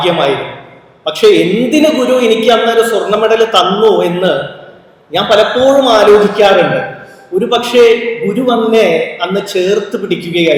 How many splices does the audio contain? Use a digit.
0